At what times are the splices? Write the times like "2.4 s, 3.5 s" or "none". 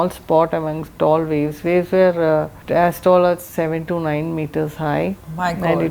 2.6 s